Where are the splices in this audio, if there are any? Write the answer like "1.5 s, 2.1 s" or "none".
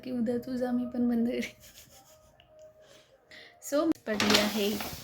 3.9 s